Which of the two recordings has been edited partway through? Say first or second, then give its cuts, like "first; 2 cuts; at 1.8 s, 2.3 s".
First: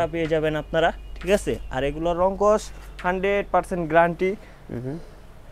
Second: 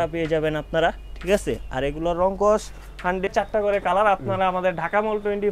second; 1 cut; at 3.3 s